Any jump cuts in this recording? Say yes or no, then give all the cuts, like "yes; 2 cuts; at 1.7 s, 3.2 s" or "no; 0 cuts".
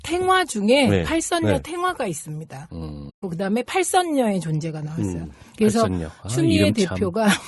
no; 0 cuts